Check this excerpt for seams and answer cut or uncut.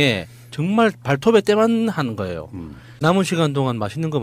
cut